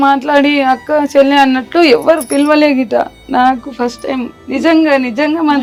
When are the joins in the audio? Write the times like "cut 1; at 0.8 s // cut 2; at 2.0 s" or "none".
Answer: none